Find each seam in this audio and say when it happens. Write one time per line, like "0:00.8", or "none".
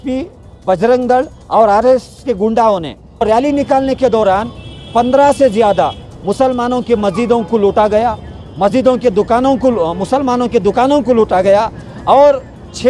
0:03.2